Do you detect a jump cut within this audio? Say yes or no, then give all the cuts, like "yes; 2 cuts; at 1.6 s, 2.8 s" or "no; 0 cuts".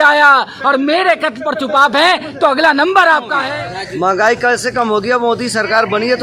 yes; 1 cut; at 3.4 s